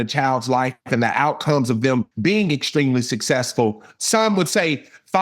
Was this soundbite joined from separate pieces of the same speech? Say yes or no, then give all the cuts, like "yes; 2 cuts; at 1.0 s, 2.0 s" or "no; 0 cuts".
yes; 2 cuts; at 2.1 s, 3.9 s